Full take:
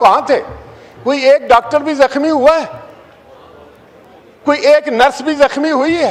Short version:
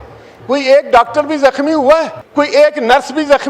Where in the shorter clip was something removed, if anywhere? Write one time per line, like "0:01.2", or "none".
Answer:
0:02.2